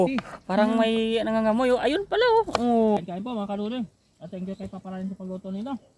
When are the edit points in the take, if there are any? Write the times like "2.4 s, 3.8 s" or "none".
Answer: 3.0 s